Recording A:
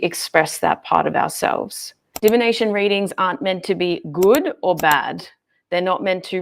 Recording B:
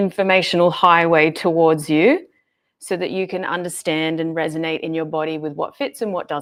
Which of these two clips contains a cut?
A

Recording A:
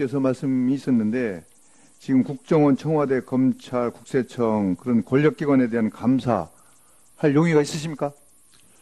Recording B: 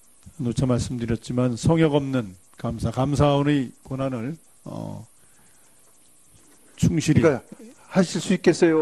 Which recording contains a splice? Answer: A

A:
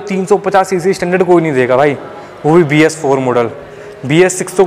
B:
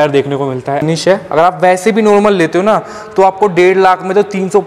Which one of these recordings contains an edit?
B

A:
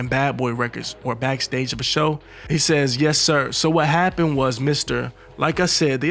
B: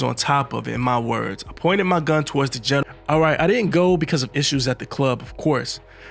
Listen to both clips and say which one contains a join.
B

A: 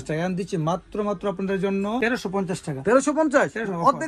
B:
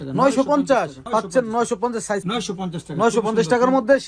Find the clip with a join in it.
B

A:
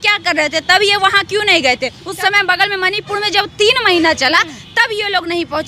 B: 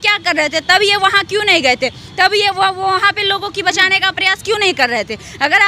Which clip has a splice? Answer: A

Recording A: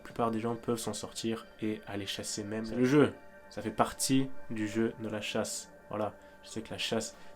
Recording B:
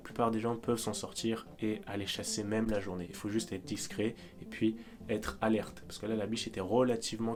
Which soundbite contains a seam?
A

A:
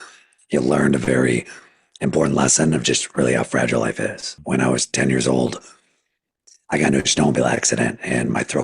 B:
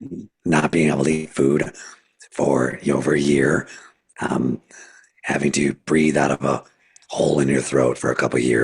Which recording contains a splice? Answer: A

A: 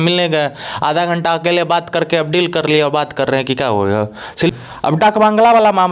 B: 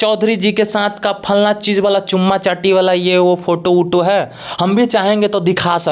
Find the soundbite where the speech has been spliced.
A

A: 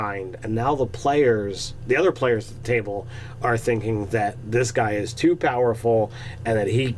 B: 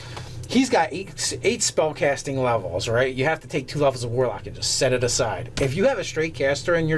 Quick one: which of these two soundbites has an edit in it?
A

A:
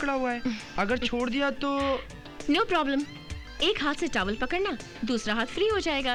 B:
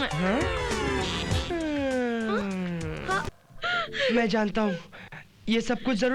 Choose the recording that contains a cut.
B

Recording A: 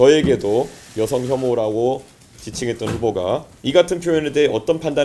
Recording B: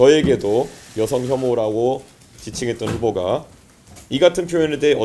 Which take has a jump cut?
A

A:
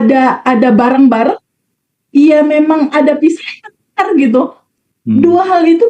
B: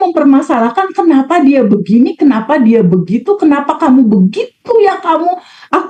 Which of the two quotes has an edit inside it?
A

